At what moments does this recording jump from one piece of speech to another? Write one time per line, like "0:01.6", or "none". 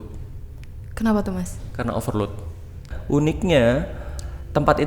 0:02.9